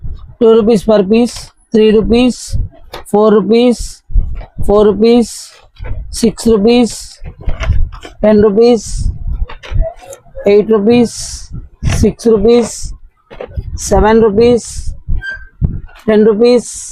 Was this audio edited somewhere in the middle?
no; 0 cuts

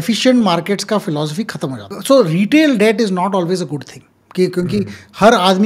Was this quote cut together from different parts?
yes; 1 cut; at 1.9 s

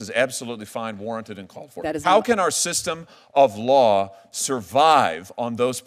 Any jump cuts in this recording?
no; 0 cuts

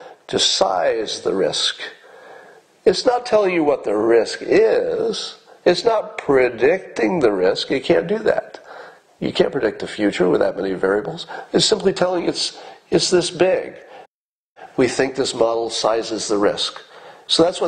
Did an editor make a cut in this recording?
yes; 1 cut; at 14.2 s

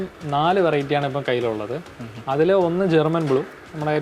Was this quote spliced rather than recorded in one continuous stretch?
no; 0 cuts

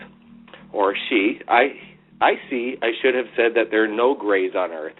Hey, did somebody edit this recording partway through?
no; 0 cuts

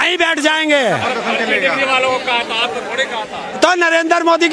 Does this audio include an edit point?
no; 0 cuts

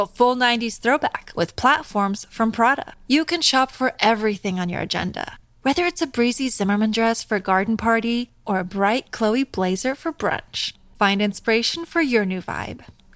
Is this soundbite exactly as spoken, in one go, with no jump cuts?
yes; 0 cuts

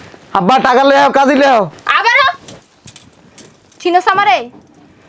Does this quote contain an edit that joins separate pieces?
no; 0 cuts

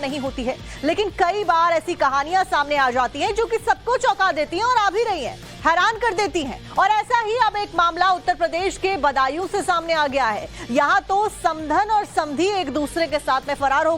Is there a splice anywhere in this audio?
yes; 1 cut; at 3.0 s

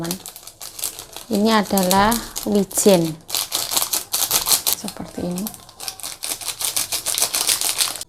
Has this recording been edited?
no; 0 cuts

